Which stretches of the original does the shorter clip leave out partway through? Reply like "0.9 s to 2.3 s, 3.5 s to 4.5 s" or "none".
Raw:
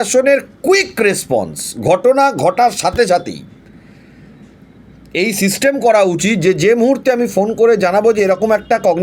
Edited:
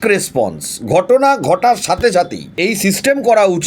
3.4 s to 5.0 s